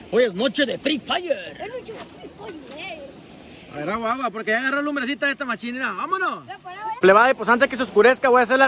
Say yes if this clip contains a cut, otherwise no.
yes